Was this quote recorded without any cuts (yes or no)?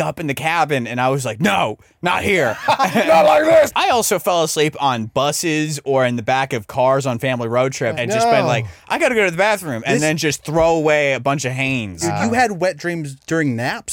no